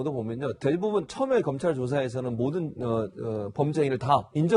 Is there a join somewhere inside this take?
no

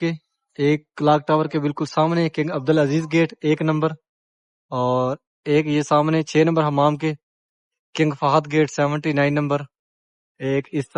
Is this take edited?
no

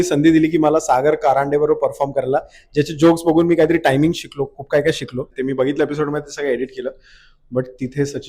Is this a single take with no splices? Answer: no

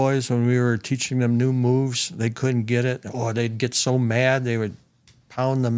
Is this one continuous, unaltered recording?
yes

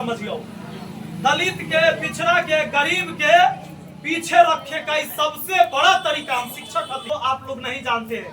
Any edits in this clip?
yes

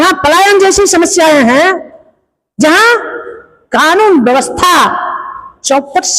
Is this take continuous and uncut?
yes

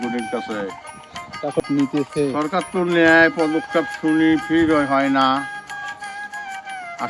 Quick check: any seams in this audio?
yes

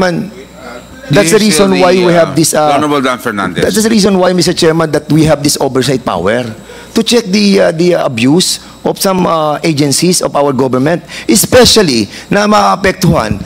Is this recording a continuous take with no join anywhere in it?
yes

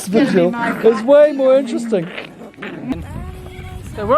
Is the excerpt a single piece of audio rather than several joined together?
no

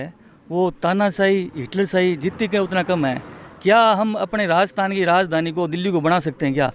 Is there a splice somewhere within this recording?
no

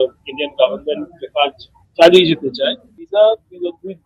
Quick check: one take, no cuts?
no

